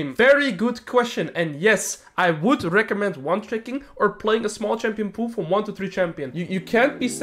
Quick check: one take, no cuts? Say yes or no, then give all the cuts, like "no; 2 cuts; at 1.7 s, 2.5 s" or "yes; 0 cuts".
no; 1 cut; at 6.3 s